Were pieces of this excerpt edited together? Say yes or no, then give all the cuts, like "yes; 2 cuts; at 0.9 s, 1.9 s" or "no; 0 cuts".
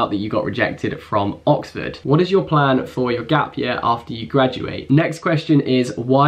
yes; 2 cuts; at 2.0 s, 4.8 s